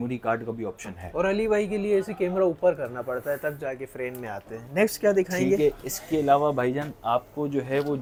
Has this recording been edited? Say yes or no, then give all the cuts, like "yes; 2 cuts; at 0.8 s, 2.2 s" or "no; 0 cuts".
no; 0 cuts